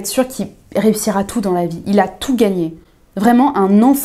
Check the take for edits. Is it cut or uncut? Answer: uncut